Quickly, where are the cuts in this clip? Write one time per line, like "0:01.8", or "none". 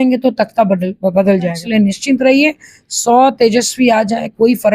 0:01.6